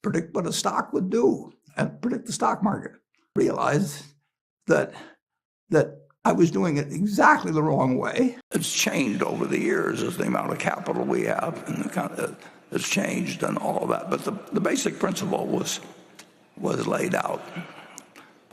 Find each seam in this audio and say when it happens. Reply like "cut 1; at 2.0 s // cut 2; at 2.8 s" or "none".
cut 1; at 3.3 s // cut 2; at 8.4 s